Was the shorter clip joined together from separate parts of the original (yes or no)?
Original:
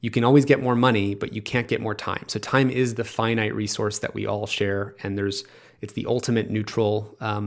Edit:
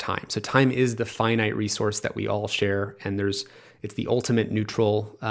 no